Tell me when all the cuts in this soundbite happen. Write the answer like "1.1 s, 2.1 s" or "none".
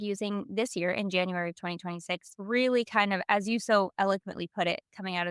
2.3 s